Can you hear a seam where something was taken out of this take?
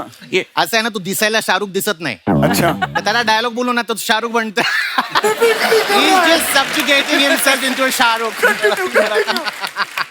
no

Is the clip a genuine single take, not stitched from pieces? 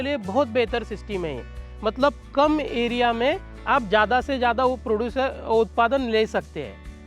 yes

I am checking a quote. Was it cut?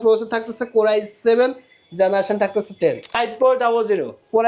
yes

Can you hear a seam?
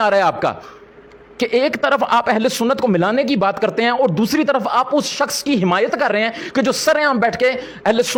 no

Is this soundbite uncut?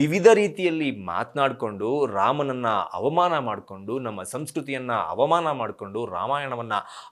yes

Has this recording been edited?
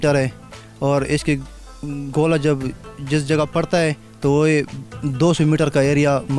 no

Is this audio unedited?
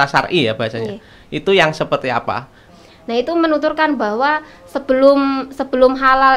no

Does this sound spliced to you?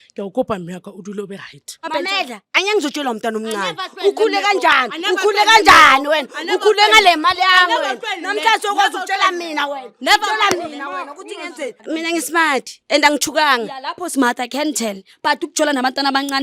yes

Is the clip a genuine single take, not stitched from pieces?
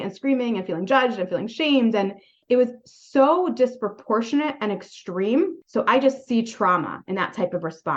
no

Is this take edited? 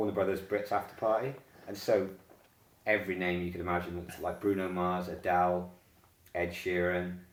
no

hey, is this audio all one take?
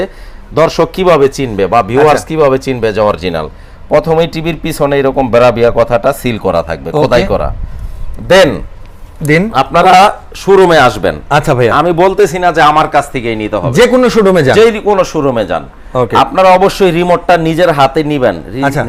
yes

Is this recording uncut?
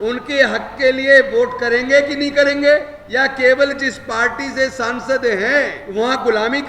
no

